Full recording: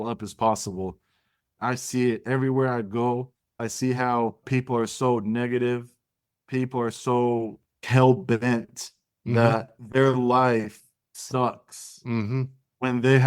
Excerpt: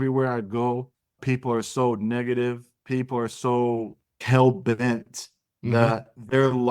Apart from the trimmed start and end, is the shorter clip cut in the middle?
yes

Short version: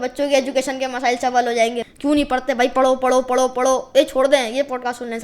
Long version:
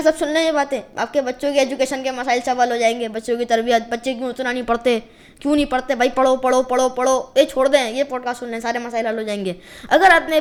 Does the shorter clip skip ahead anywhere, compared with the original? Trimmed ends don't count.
yes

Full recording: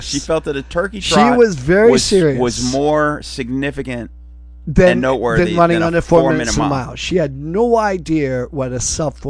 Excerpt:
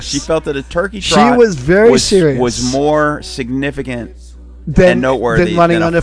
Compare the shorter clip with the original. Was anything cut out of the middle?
no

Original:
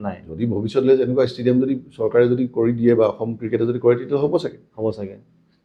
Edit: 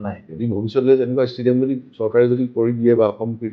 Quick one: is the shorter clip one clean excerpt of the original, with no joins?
yes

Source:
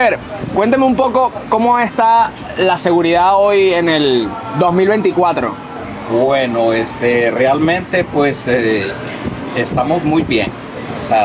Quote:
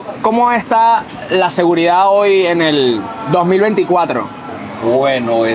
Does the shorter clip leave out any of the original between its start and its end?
no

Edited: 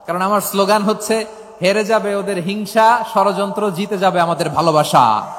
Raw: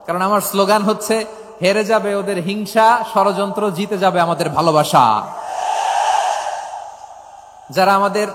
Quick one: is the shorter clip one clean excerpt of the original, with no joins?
yes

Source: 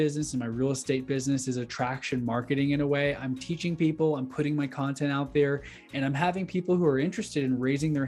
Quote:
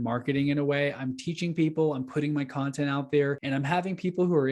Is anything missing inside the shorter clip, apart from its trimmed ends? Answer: yes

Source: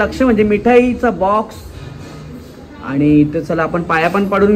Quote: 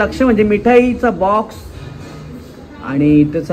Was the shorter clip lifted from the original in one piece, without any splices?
yes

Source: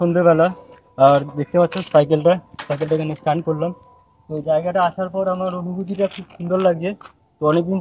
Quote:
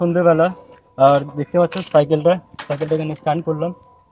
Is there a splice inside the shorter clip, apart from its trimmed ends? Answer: no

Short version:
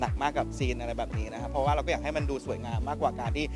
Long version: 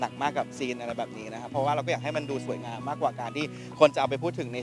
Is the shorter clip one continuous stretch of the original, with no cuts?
yes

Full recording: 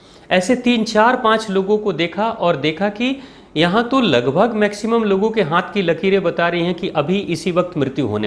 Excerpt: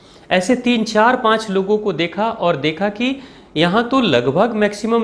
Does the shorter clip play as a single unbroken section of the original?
yes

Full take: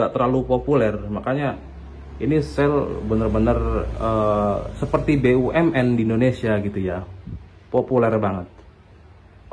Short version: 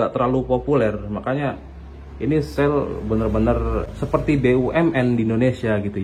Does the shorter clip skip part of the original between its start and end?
yes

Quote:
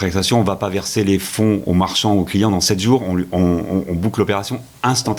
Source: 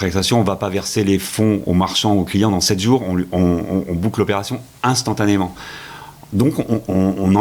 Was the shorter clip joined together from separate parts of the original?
no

